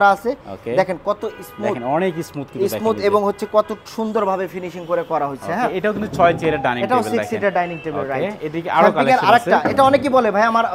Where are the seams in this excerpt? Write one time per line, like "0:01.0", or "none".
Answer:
none